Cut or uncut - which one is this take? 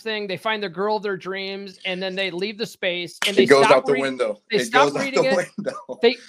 uncut